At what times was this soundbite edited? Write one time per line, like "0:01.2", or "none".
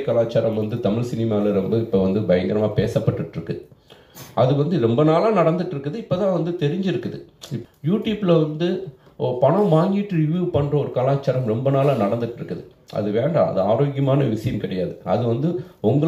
0:07.5